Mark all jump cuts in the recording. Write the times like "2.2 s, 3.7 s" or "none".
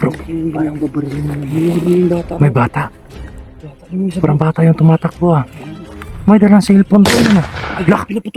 none

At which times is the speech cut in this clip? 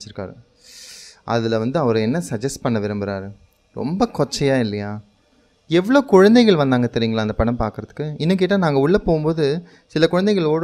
none

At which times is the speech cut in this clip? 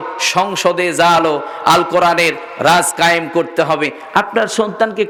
none

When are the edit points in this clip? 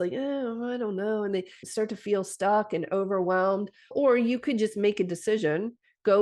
1.5 s, 3.9 s

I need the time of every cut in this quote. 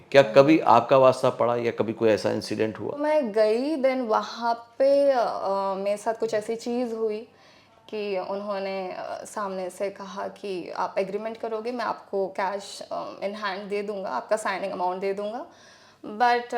3.0 s

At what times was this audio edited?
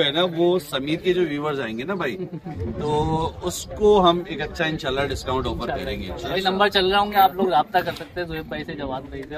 none

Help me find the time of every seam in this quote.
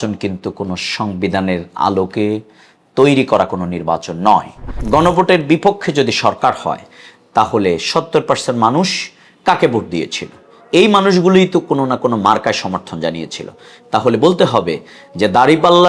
4.8 s

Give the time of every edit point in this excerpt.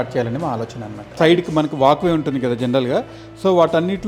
1.2 s

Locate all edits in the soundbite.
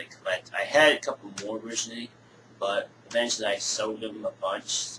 2.3 s

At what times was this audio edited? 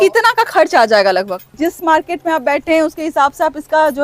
1.5 s

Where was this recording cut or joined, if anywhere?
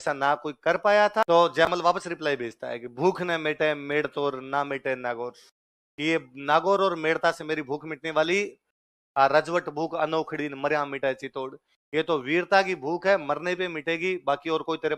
1.2 s

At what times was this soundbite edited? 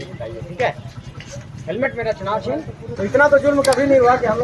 2.9 s

